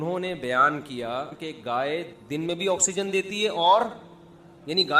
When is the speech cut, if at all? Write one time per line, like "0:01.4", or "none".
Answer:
0:01.9